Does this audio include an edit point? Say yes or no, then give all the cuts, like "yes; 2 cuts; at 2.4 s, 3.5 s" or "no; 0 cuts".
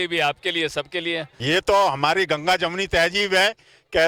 yes; 1 cut; at 1.3 s